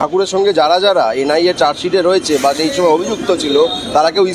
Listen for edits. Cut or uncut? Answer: uncut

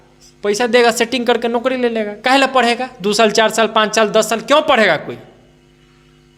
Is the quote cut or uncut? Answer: uncut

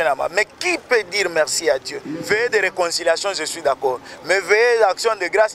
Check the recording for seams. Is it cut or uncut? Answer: cut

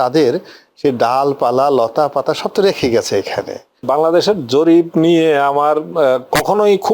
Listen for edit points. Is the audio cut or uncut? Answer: cut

